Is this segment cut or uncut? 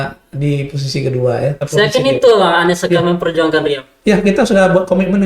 cut